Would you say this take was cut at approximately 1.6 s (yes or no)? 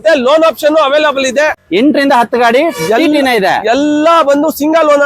yes